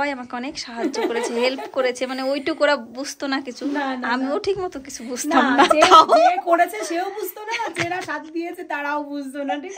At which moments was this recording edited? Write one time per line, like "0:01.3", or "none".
none